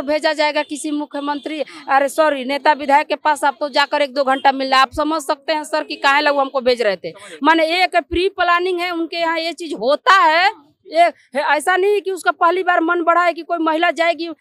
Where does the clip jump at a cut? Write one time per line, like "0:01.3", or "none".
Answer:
none